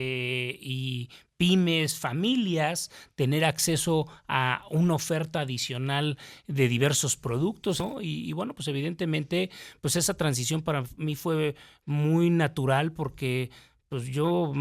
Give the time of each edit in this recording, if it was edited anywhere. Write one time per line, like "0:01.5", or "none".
0:07.8